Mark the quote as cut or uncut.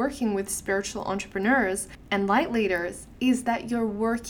cut